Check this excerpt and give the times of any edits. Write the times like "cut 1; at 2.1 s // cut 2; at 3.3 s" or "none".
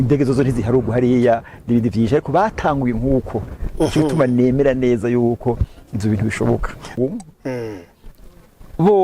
cut 1; at 6.9 s